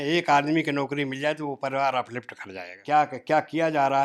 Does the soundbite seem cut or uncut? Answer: cut